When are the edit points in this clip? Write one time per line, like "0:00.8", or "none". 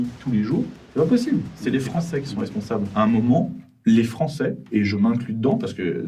0:01.5

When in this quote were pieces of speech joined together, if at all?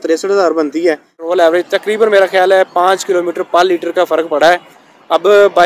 0:01.2

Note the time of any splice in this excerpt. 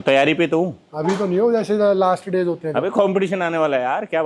none

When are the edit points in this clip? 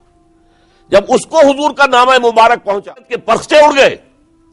0:03.2

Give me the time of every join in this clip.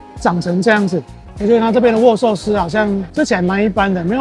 0:01.2

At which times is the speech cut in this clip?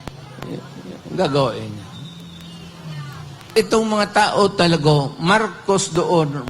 0:03.5

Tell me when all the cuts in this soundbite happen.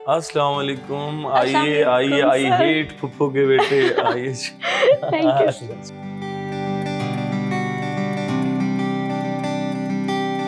0:06.0

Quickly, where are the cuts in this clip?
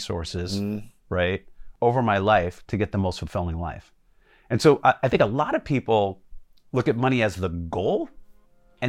0:01.6

